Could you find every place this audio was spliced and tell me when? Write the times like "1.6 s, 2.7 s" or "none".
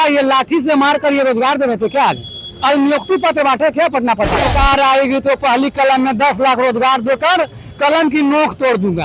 4.5 s